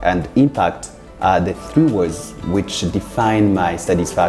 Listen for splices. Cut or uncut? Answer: uncut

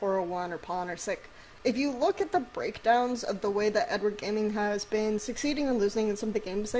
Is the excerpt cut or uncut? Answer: cut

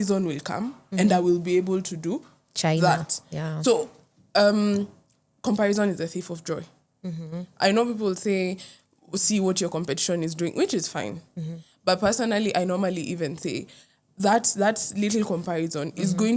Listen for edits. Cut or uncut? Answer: uncut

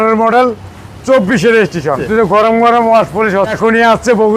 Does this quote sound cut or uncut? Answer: cut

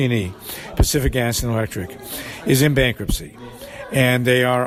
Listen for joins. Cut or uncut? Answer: uncut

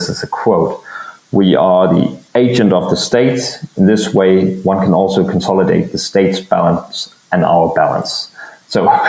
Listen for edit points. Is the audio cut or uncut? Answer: uncut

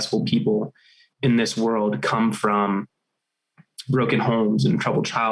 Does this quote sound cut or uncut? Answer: uncut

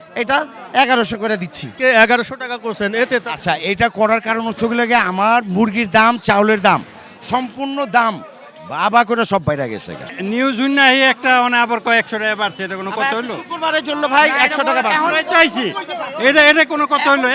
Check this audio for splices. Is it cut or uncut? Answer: cut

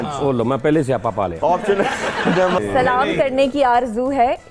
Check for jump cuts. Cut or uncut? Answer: cut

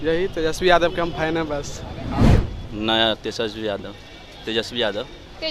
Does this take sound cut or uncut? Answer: cut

